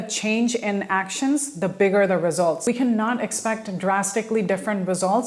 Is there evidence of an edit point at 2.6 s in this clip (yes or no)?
yes